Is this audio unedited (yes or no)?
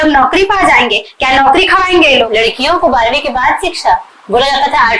no